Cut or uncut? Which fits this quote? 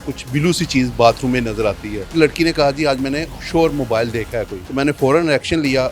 cut